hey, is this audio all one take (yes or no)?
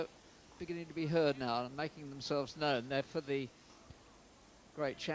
yes